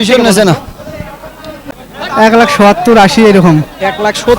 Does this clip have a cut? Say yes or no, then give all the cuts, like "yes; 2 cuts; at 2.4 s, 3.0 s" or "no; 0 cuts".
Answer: yes; 1 cut; at 1.7 s